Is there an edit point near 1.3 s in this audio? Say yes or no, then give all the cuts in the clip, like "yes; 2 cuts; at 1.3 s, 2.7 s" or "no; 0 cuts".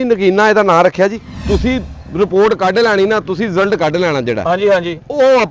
yes; 1 cut; at 1.3 s